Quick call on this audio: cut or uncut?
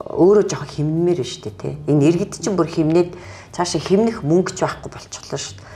uncut